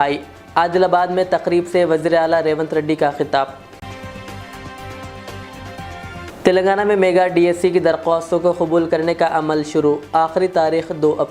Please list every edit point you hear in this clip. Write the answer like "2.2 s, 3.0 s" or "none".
none